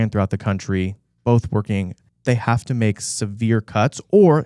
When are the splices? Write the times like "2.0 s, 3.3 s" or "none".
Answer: 2.0 s